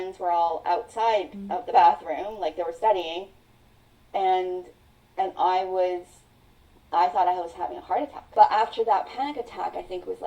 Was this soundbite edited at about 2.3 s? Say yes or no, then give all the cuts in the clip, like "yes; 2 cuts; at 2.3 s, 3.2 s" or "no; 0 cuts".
no; 1 cut; at 8.2 s